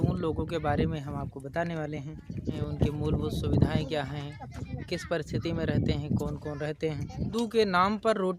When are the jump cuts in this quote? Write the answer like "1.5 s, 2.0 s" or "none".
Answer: 2.6 s, 7.2 s